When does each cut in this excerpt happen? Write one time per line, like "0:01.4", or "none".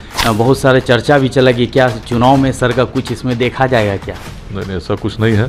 none